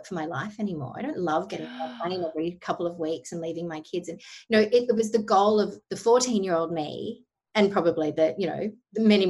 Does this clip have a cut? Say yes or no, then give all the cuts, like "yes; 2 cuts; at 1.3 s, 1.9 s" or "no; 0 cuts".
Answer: no; 0 cuts